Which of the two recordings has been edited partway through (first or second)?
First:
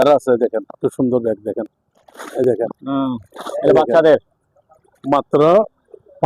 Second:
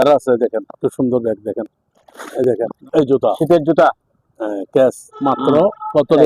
second